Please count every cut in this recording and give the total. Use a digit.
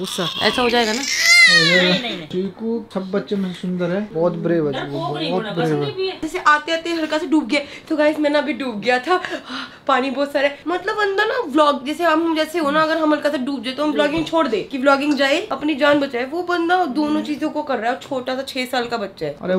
0